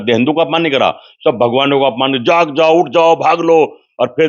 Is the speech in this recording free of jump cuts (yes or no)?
yes